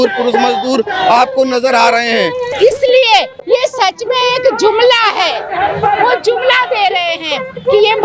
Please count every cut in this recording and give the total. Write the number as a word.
one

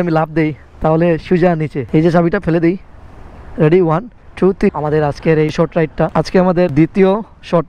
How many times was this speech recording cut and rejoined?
two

